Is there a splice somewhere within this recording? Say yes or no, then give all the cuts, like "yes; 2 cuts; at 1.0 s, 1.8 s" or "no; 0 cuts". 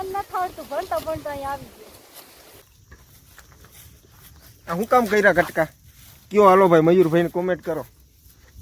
yes; 1 cut; at 2.7 s